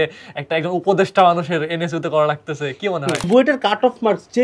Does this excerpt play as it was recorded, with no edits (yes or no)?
no